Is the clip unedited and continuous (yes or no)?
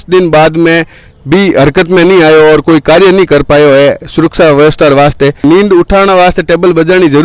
no